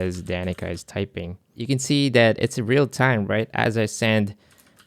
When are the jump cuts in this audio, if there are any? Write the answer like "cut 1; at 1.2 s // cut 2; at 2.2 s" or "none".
cut 1; at 1.6 s